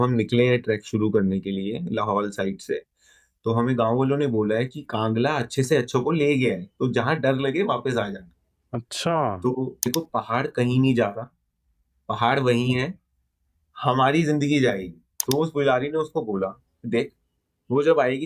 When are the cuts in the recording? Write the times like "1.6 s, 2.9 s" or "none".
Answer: 9.9 s, 15.1 s

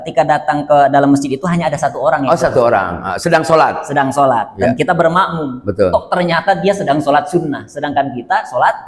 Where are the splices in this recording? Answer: none

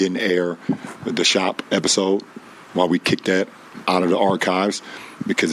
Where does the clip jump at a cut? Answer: 3.7 s

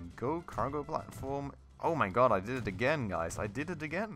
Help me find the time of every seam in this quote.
none

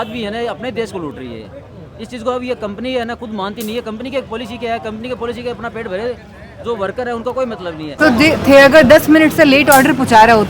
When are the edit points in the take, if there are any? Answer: 7.9 s

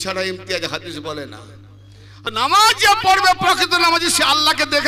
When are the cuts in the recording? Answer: 2.3 s

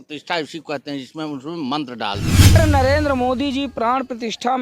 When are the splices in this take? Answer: 2.6 s

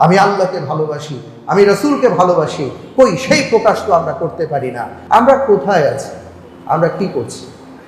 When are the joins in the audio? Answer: 4.9 s

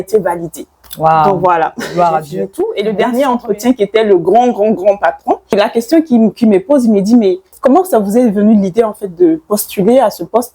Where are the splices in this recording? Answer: 2.4 s, 5.5 s, 7.5 s

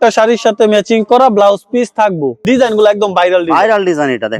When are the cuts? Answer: none

